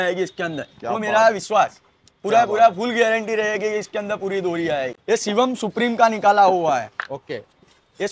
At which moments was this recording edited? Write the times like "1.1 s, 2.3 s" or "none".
4.9 s